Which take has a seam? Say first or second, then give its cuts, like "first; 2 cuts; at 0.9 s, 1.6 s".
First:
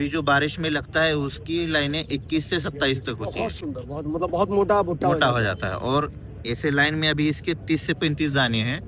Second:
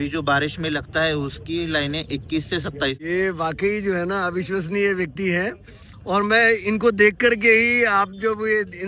second; 1 cut; at 3.0 s